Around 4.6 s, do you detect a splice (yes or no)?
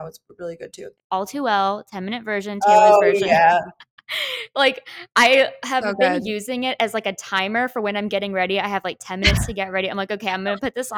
no